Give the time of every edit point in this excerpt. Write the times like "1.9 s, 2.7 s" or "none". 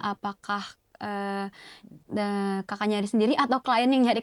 none